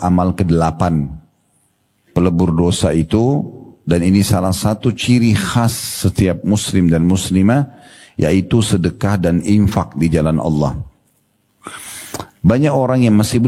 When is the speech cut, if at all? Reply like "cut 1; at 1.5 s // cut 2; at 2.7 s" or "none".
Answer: none